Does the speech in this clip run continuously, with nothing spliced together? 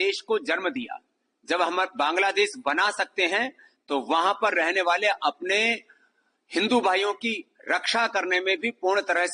yes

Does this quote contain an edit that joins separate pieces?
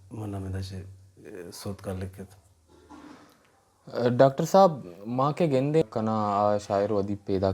yes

